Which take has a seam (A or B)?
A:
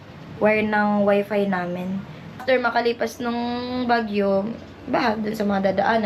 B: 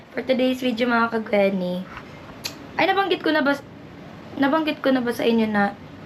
A